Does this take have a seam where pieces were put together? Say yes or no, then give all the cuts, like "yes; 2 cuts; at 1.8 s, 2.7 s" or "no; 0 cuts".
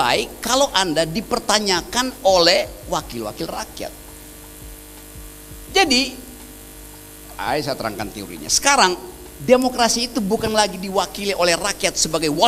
no; 0 cuts